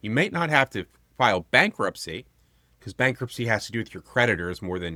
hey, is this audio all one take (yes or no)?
yes